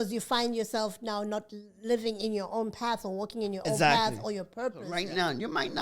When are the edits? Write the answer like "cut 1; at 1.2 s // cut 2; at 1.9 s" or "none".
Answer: cut 1; at 4.8 s